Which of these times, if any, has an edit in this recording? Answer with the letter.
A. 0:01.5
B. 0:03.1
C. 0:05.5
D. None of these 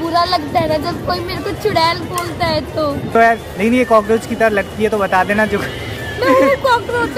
B